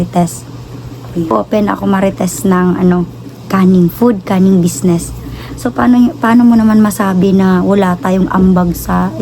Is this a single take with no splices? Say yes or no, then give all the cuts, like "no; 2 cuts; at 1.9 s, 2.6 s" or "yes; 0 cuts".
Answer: no; 1 cut; at 1.3 s